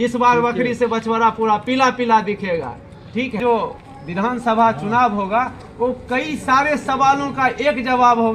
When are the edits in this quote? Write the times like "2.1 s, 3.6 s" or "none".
3.4 s

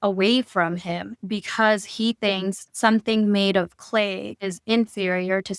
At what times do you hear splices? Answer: none

